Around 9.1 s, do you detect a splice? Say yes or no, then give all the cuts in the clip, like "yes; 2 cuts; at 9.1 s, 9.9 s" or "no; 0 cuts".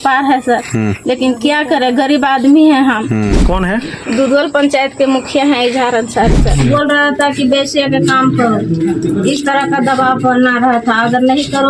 no; 2 cuts; at 3.4 s, 6.5 s